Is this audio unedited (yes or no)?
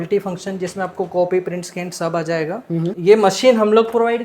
no